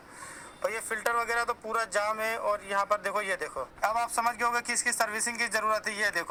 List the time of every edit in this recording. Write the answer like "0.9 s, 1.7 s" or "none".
none